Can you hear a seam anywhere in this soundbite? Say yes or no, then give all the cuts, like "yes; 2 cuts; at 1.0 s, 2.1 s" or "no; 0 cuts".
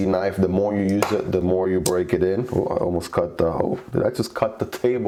no; 0 cuts